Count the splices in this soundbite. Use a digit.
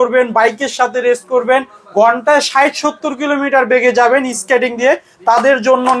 0